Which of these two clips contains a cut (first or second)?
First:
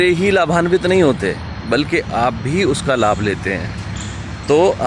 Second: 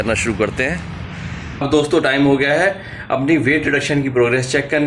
second